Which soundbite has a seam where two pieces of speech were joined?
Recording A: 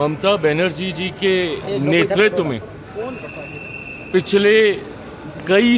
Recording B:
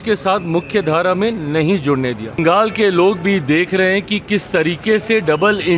B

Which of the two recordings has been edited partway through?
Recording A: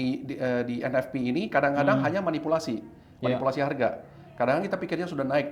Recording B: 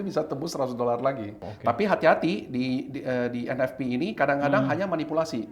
B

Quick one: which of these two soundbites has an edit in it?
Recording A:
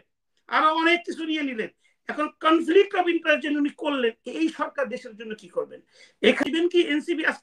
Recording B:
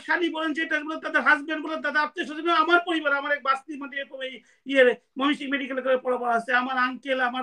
A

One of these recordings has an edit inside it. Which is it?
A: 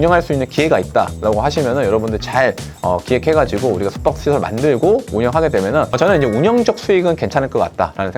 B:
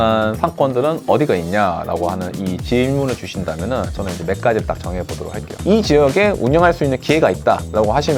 B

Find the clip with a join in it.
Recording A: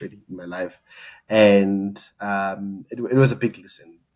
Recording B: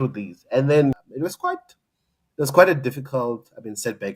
B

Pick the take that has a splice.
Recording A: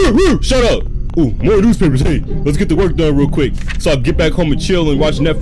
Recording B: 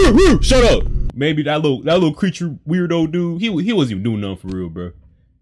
B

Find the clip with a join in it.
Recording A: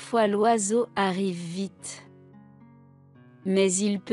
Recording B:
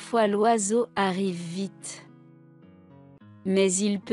B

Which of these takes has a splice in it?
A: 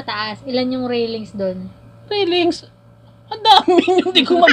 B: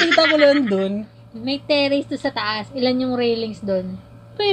B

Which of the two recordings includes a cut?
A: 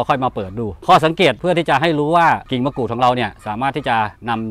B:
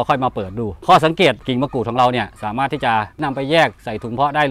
B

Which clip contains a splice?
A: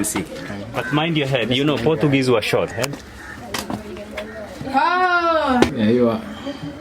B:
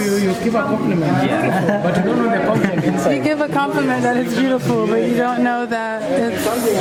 A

